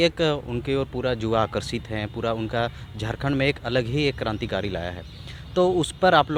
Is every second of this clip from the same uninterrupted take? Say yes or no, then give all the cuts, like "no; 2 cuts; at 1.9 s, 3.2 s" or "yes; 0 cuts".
yes; 0 cuts